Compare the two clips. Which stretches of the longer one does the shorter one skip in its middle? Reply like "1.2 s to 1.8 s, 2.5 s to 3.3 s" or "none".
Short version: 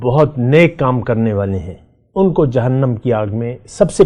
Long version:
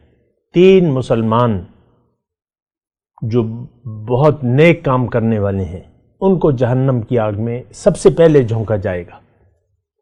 none